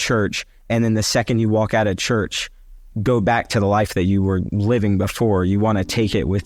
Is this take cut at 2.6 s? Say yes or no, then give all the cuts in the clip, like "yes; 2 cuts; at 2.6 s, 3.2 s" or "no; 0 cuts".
no; 0 cuts